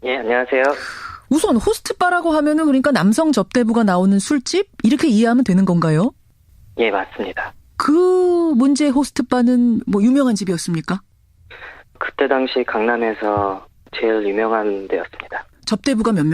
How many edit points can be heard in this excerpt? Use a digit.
1